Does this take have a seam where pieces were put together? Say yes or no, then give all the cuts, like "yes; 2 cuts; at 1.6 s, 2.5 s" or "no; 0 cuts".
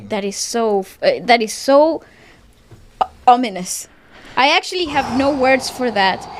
no; 0 cuts